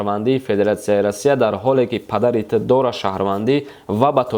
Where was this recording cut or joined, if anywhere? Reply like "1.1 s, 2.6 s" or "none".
none